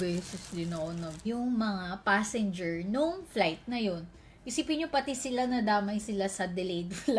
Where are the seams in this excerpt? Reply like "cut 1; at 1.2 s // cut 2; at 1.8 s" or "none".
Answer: cut 1; at 1.1 s